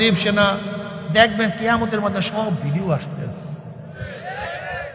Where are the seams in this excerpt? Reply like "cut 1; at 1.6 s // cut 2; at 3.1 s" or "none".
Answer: none